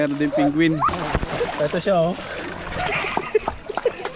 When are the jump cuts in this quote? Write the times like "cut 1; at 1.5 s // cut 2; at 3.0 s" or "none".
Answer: cut 1; at 1.0 s